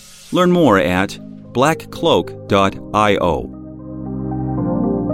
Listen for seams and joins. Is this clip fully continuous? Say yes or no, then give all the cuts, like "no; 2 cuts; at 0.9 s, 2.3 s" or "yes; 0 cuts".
no; 1 cut; at 3.9 s